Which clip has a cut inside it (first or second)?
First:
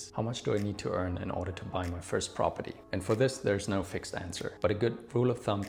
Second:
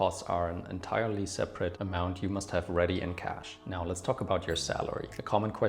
second